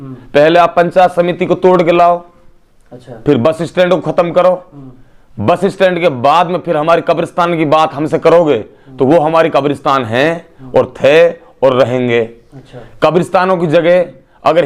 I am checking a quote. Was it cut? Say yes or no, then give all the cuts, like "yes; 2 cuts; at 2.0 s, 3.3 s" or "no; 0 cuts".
no; 0 cuts